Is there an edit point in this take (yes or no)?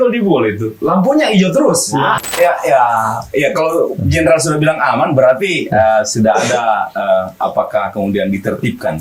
yes